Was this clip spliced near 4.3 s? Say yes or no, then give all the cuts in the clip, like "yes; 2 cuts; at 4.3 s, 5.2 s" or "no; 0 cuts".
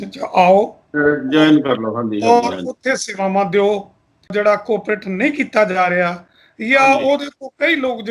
yes; 1 cut; at 4.3 s